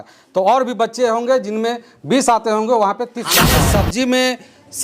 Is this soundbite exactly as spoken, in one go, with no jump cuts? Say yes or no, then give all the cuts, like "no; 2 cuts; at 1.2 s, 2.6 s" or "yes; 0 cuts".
no; 1 cut; at 3.5 s